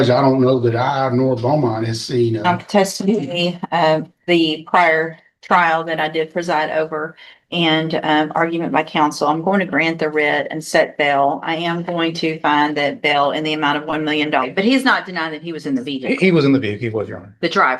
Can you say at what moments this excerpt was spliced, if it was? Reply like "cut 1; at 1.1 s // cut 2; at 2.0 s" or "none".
cut 1; at 2.4 s // cut 2; at 14.4 s